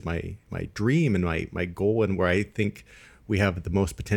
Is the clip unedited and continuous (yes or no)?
yes